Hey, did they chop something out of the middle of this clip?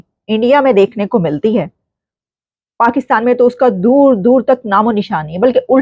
no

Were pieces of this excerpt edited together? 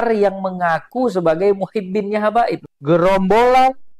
yes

